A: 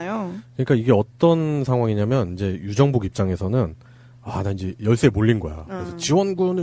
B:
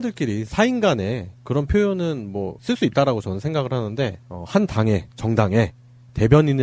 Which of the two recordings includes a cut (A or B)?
A